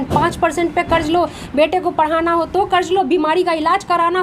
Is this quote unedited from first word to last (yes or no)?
no